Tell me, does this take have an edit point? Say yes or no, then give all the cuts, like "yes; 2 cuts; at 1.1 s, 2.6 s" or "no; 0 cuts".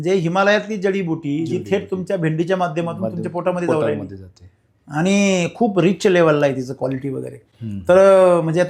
no; 0 cuts